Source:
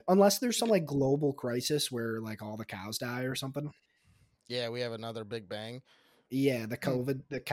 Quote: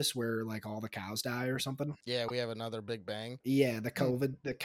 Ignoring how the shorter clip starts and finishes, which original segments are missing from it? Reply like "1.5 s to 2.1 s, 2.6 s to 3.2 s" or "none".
3.7 s to 4.4 s, 5.7 s to 6.2 s